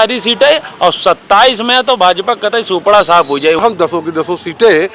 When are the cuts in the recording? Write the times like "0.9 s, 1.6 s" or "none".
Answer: 3.6 s